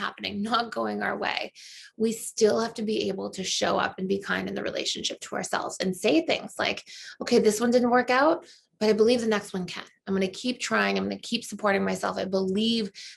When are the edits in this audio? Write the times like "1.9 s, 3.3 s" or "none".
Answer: none

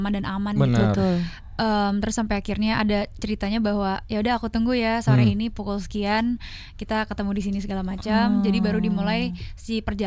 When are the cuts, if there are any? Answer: none

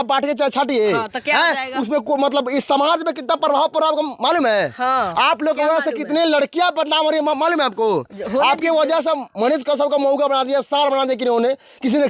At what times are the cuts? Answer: none

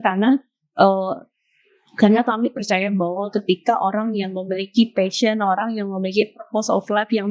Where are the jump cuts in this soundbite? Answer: 3.3 s

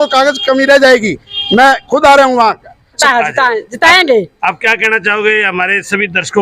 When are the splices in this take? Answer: 3.0 s

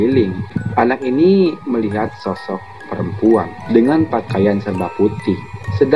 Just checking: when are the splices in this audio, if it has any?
3.6 s

